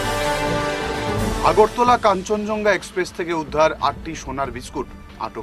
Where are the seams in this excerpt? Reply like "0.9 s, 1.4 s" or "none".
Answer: none